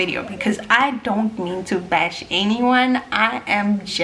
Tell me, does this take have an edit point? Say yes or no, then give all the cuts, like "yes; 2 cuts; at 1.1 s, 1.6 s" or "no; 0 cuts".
no; 0 cuts